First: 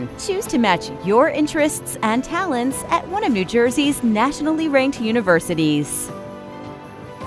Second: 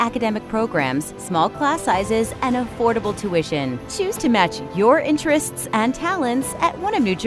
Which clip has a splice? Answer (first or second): first